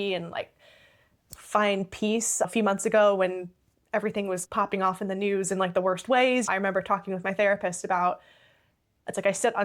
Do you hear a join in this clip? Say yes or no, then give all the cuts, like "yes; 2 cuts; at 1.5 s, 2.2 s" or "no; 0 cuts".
yes; 3 cuts; at 2.5 s, 4.5 s, 6.5 s